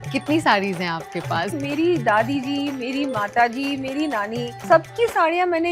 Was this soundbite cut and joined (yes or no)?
yes